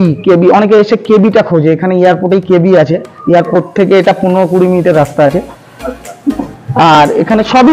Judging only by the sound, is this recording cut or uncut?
uncut